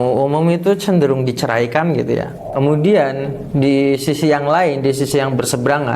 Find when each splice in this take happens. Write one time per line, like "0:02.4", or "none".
0:02.4